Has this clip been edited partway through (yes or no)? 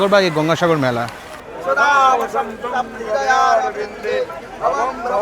no